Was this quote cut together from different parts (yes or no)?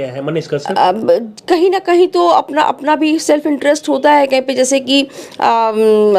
no